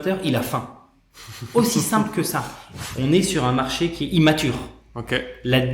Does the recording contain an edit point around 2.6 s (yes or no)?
yes